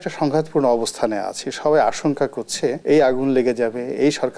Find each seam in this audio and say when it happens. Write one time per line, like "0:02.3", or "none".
0:02.8